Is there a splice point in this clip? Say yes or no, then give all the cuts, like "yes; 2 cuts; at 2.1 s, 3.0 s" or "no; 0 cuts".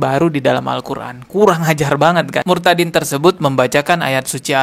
yes; 1 cut; at 2.4 s